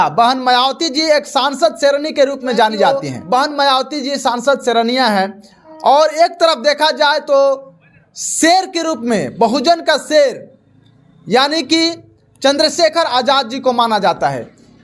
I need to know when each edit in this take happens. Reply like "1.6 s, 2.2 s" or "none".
3.1 s